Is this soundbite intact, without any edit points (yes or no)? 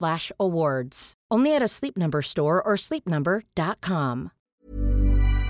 no